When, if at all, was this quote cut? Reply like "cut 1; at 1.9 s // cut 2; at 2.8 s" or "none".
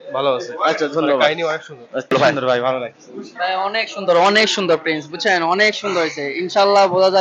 cut 1; at 2.1 s